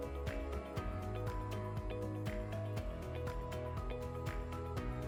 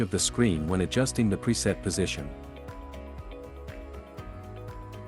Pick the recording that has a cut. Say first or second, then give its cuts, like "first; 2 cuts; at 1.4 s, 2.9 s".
second; 1 cut; at 2.3 s